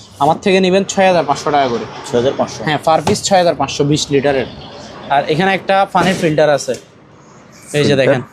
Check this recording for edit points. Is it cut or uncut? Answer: uncut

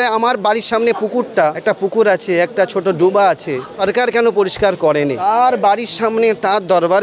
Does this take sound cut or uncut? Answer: cut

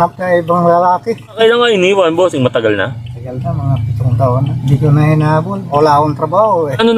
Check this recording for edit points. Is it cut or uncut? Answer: uncut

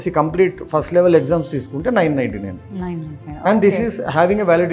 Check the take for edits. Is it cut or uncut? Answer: uncut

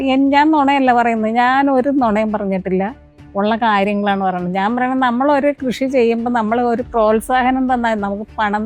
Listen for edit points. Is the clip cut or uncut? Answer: uncut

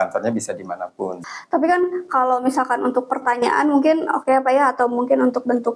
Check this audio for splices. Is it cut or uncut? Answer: cut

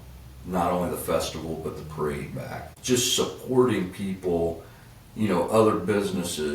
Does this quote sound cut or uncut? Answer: cut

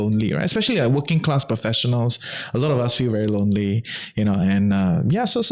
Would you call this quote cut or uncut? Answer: uncut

